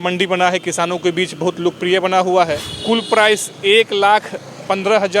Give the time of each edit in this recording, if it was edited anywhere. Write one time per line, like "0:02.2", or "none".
0:02.7

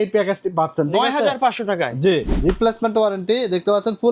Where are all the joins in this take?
0:02.3

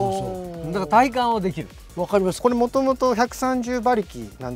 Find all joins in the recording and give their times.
0:02.4

